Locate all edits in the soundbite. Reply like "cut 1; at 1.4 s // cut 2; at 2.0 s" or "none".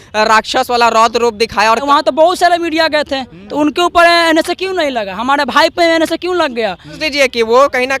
cut 1; at 1.8 s // cut 2; at 7.0 s

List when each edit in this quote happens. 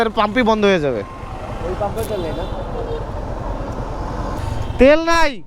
cut 1; at 4.2 s

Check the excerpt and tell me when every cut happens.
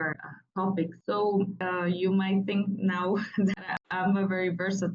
cut 1; at 1.0 s // cut 2; at 1.6 s

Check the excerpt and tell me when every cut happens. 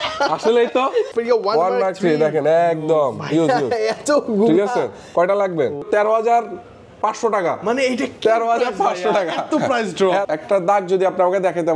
cut 1; at 1.1 s // cut 2; at 5.8 s // cut 3; at 10.3 s

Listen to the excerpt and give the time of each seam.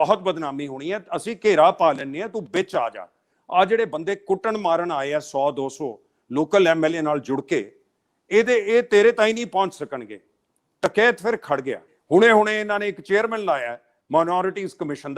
cut 1; at 11.9 s

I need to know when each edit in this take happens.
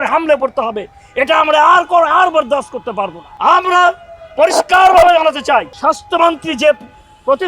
cut 1; at 3.2 s // cut 2; at 5.7 s

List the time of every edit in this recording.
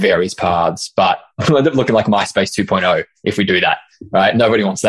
cut 1; at 1.4 s

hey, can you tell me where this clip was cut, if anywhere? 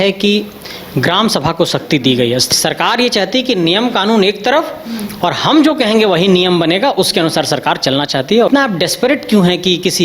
cut 1; at 2.5 s // cut 2; at 8.5 s

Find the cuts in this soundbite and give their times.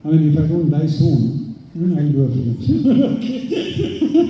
none

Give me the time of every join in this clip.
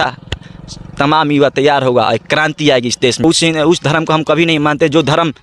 cut 1; at 3.2 s

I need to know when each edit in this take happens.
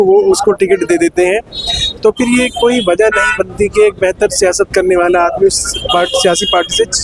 none

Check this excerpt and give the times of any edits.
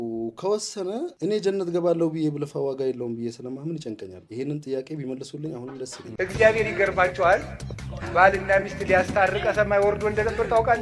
cut 1; at 6.2 s

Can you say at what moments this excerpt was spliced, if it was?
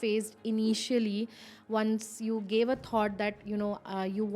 none

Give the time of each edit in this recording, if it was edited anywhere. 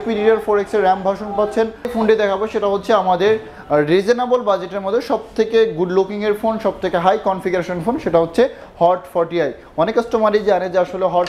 cut 1; at 1.8 s

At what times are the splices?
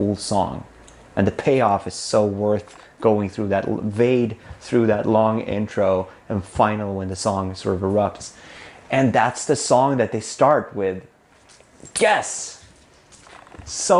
none

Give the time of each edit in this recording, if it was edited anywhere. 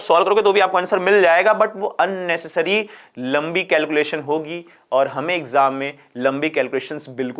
none

